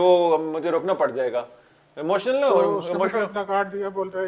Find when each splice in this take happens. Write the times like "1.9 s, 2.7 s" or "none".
none

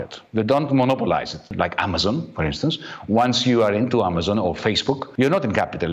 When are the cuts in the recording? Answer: 1.5 s, 5.1 s

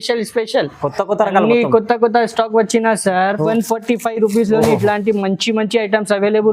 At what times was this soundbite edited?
3.4 s

